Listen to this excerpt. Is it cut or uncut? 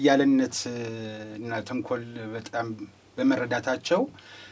uncut